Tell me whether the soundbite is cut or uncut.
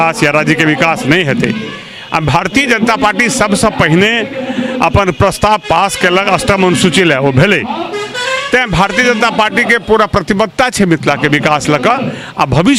uncut